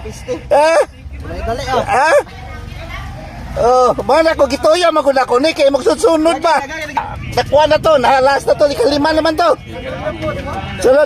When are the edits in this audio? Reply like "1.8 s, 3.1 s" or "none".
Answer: 7.1 s

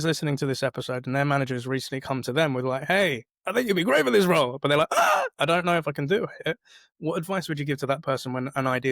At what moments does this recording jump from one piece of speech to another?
none

